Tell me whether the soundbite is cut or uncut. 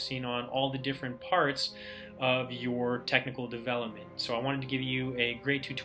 uncut